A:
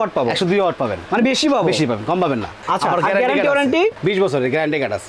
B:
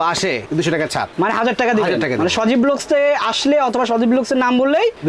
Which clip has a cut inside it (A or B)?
A